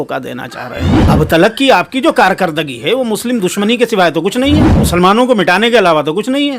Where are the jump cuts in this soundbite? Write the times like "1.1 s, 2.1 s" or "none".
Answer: 0.9 s, 4.8 s